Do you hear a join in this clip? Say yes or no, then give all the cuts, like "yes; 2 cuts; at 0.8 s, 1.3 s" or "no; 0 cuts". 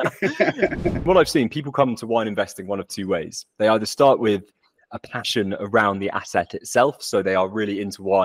yes; 1 cut; at 1.0 s